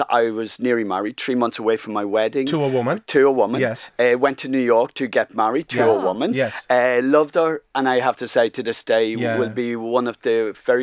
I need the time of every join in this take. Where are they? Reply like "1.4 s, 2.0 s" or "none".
none